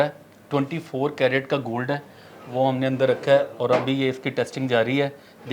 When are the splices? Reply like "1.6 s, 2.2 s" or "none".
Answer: none